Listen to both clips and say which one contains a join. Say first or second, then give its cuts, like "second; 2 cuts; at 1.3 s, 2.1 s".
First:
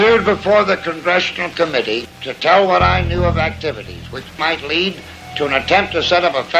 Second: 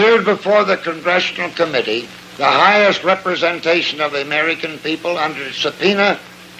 first; 2 cuts; at 2.2 s, 4.3 s